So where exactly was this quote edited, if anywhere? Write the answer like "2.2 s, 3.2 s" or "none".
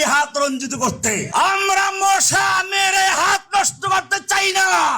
1.3 s